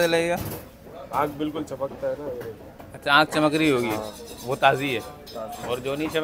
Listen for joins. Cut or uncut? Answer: uncut